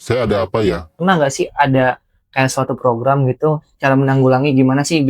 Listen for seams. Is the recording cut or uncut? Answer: cut